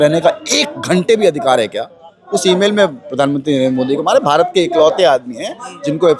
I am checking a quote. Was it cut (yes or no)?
yes